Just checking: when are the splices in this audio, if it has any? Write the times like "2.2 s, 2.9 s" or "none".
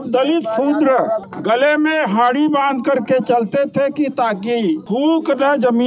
1.3 s, 4.8 s